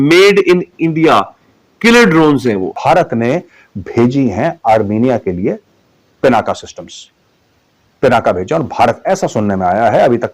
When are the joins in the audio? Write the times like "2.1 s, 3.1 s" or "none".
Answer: 2.7 s